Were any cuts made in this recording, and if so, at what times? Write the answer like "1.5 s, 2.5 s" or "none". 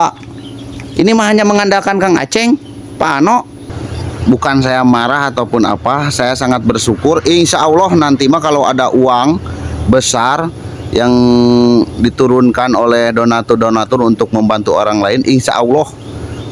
3.6 s